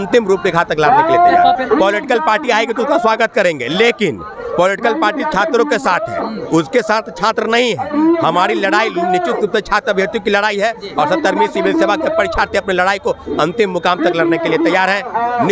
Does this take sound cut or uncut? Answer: cut